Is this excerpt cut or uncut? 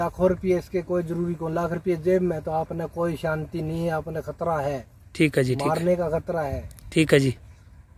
uncut